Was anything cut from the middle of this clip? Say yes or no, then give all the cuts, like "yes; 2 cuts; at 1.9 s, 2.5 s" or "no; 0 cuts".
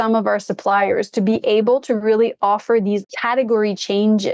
yes; 1 cut; at 3.0 s